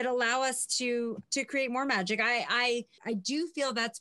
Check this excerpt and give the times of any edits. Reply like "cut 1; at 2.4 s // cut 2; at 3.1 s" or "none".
cut 1; at 3.0 s